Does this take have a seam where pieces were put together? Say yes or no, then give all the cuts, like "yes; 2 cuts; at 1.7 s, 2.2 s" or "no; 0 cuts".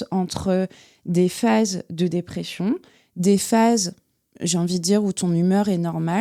no; 0 cuts